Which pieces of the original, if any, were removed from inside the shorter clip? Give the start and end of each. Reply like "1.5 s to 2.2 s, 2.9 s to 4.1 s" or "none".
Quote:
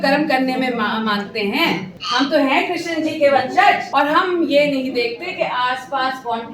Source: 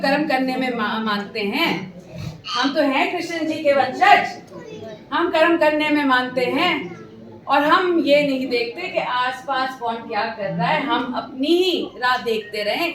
1.9 s to 2.4 s, 4.3 s to 7.4 s